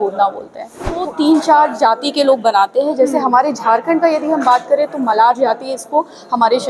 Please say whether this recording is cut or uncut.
cut